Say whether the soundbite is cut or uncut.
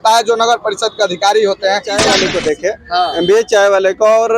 cut